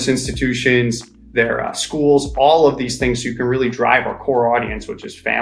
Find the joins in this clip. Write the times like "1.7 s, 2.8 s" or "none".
none

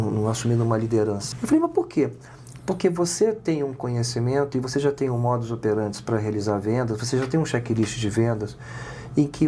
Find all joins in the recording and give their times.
1.3 s

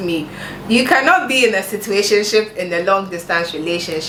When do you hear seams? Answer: none

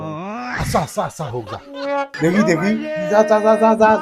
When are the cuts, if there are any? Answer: 2.1 s

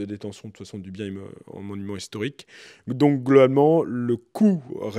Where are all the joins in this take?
none

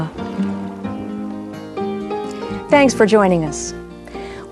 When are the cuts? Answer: none

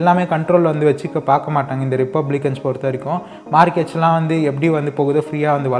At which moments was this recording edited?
none

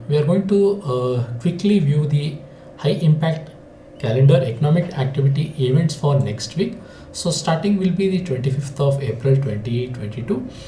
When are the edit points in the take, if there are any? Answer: none

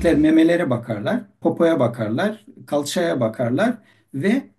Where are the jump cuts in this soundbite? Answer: 1.3 s

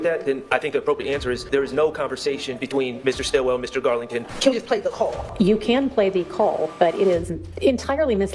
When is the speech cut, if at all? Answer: 1.4 s, 4.3 s, 5.2 s, 7.4 s

